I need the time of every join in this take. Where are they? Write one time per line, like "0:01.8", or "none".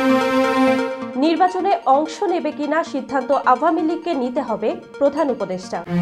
none